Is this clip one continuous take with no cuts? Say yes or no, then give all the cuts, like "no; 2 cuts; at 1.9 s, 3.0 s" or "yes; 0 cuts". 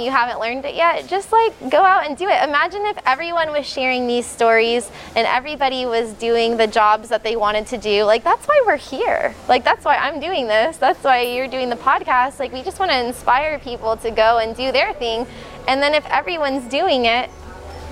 yes; 0 cuts